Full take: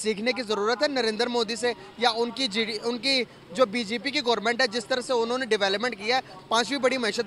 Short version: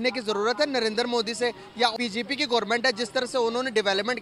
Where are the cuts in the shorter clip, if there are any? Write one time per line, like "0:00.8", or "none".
0:01.9